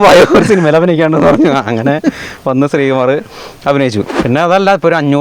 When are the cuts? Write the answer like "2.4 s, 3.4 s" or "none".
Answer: 4.2 s